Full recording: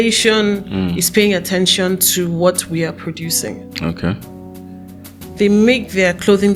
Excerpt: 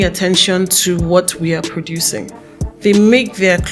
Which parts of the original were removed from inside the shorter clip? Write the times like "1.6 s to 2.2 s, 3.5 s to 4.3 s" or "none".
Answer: 3.7 s to 4.9 s